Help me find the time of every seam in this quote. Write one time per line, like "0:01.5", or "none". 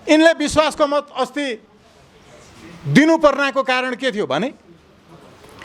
none